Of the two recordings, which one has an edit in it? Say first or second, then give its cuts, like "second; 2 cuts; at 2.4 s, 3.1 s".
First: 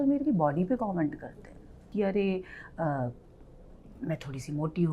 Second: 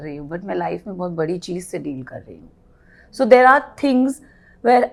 first; 1 cut; at 1.9 s